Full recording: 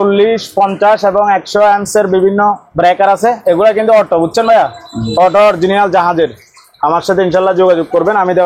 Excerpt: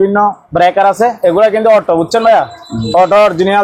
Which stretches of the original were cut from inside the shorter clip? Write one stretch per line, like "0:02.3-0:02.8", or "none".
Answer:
none